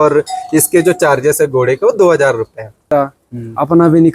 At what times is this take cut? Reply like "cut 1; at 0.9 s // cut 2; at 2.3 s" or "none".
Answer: cut 1; at 2.8 s